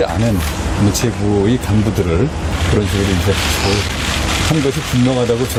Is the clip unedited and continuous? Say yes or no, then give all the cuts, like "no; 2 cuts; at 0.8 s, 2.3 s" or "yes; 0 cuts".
yes; 0 cuts